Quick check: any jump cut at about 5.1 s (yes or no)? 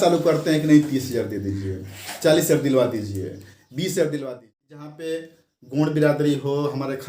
yes